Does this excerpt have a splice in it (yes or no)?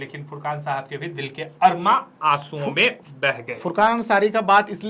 no